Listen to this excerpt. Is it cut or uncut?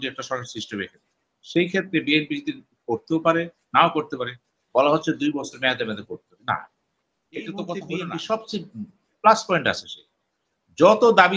cut